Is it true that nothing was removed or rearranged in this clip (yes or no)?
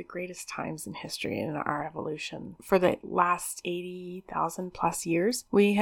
no